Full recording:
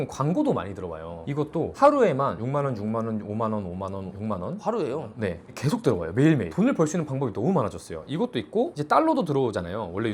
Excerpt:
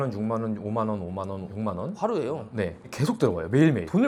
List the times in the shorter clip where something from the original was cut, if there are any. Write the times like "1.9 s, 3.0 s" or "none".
none